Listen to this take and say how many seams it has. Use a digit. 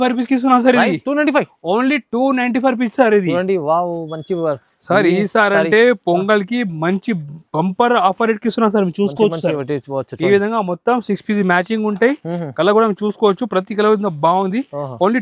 0